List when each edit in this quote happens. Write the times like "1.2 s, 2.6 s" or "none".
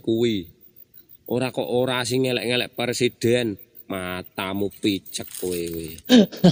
none